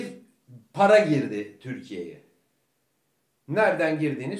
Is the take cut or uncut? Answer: uncut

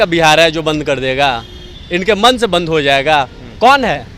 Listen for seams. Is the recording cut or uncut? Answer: uncut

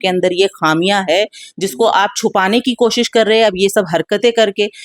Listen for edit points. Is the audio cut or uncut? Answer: uncut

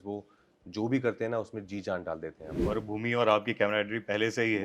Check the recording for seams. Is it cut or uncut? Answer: cut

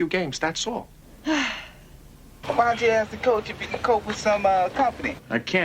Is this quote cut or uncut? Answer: cut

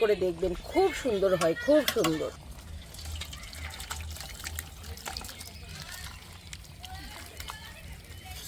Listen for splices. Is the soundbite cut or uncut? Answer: cut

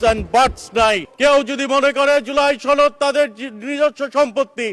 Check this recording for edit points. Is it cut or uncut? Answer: cut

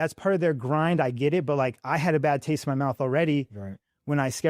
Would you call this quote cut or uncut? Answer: uncut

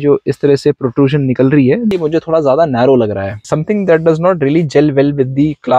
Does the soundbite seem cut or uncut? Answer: cut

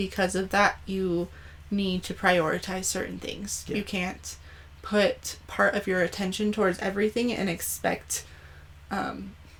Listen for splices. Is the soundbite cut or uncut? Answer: uncut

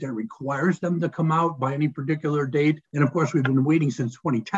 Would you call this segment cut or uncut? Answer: cut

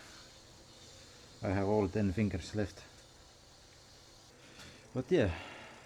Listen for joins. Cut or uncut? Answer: cut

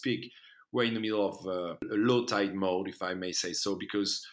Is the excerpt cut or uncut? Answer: cut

